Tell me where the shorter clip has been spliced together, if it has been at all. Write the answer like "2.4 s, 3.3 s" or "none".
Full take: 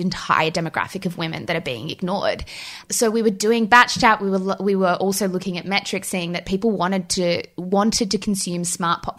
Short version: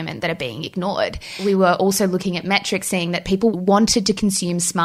1.4 s, 3.5 s

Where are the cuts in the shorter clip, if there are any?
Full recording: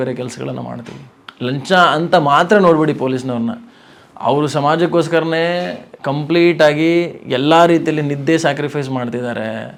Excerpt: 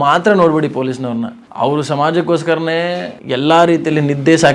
1.4 s, 3.2 s

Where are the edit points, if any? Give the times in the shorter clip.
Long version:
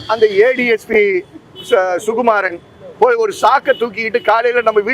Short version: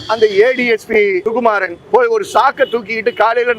1.5 s

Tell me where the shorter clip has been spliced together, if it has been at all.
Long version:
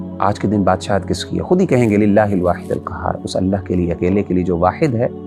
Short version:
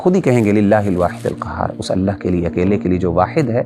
none

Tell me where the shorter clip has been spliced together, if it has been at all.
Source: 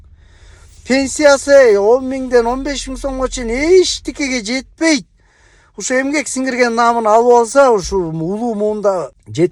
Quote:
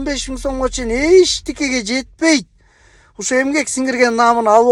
none

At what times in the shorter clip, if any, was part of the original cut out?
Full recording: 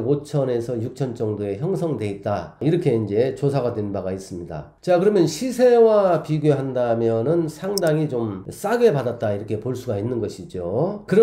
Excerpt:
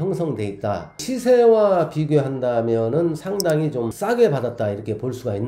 1.0 s, 3.4 s

